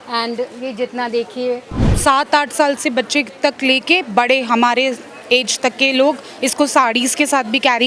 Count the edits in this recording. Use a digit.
1